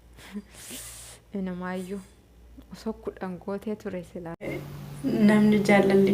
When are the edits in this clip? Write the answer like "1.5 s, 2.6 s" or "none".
4.6 s